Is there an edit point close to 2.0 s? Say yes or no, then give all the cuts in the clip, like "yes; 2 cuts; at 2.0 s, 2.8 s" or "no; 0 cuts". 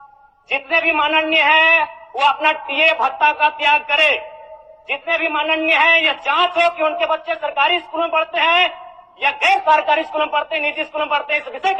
no; 0 cuts